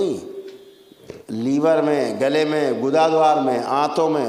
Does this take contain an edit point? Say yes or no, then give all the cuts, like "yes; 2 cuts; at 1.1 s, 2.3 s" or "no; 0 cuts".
no; 0 cuts